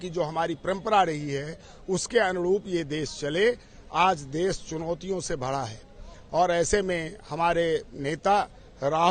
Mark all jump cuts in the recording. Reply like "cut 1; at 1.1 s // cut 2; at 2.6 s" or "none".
none